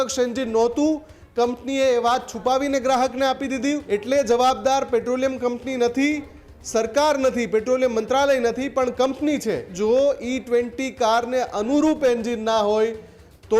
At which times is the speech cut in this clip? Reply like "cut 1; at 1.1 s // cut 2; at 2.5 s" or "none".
cut 1; at 3.8 s // cut 2; at 9.7 s